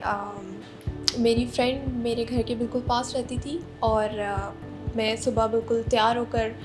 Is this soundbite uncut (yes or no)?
yes